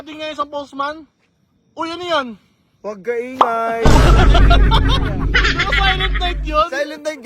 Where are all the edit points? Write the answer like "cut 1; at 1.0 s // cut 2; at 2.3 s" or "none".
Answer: none